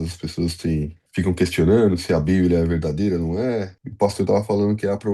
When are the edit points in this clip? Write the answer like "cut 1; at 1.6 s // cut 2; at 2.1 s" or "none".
cut 1; at 1.0 s // cut 2; at 3.8 s

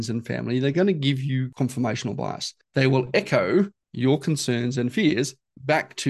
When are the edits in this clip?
cut 1; at 1.5 s // cut 2; at 2.8 s // cut 3; at 3.8 s

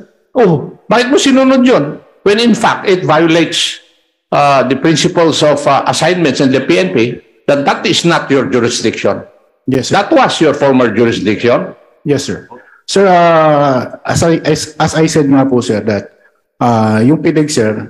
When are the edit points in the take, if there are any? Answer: none

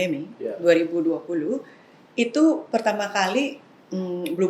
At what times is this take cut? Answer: none

